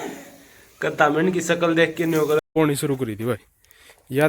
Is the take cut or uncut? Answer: cut